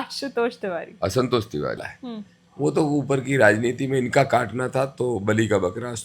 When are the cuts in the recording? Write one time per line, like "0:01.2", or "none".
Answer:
0:01.8

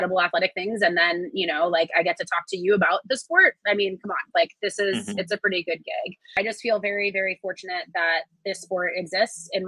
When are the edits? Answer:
0:06.4

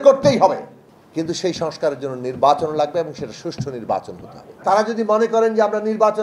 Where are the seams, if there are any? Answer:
0:04.6

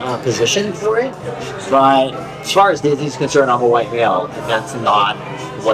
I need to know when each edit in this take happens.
0:02.2

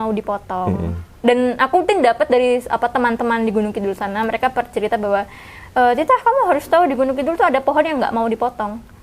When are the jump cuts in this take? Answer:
none

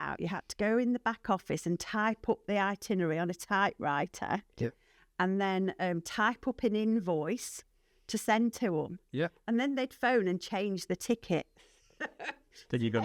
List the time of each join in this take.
none

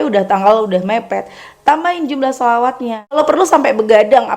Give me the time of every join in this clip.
0:03.2

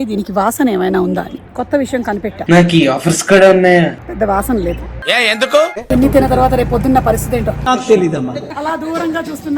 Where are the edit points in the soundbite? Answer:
0:01.4
0:02.4
0:04.0
0:05.9
0:07.6
0:08.5

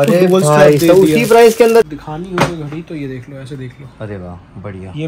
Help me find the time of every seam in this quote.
0:01.8

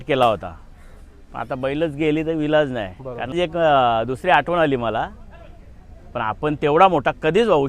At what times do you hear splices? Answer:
0:03.3

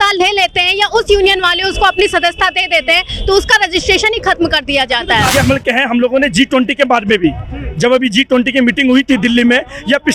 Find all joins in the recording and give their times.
0:05.3

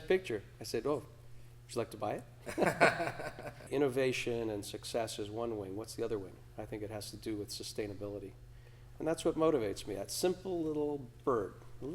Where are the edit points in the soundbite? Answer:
0:03.6

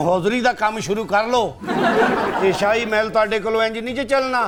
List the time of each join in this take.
none

